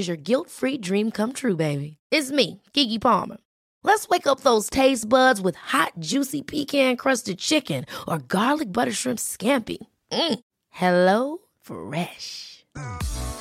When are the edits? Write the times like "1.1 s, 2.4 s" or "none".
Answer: none

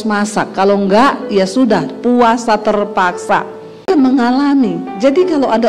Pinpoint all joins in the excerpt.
4.0 s

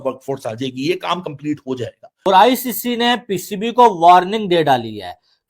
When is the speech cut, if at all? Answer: 2.1 s

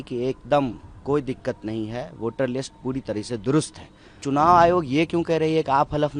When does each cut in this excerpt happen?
4.2 s

